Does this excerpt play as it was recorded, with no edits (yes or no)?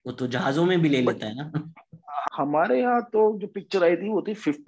no